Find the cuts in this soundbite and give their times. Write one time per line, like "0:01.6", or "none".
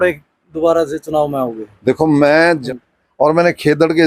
0:02.6